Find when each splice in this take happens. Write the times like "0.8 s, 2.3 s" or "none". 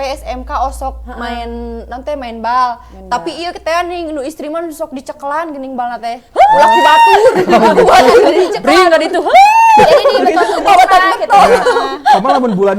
none